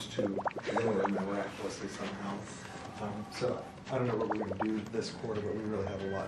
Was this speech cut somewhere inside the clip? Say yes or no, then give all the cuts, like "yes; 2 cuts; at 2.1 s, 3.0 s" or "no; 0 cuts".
yes; 1 cut; at 0.9 s